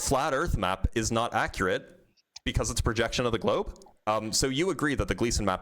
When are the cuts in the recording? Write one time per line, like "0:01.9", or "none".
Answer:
0:03.8